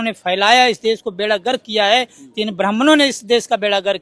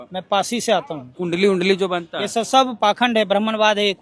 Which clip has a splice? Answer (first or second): second